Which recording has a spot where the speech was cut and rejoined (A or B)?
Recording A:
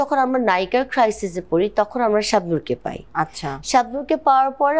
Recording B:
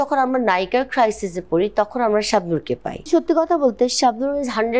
B